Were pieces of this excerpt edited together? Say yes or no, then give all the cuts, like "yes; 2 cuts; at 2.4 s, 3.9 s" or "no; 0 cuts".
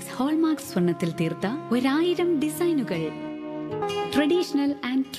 yes; 1 cut; at 3.8 s